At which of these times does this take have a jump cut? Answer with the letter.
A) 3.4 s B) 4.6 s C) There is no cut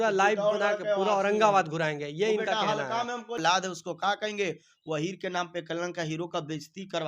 A